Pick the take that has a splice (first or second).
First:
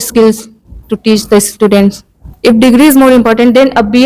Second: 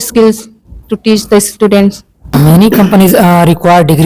second